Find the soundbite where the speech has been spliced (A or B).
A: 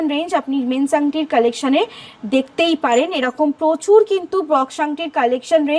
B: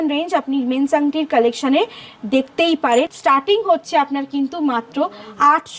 B